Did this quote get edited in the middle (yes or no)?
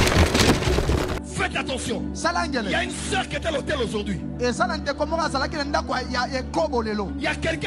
yes